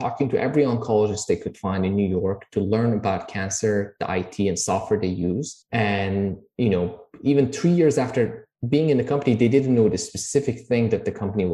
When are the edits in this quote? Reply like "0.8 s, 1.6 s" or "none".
none